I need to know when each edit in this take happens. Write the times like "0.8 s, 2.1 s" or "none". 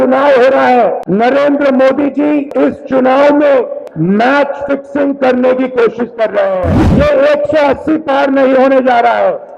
1.0 s, 2.5 s, 3.8 s, 6.8 s